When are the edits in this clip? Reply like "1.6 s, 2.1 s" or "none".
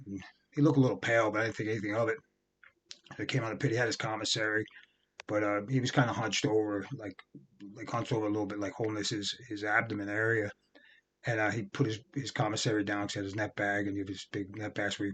none